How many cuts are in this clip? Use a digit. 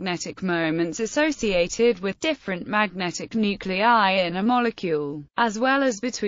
1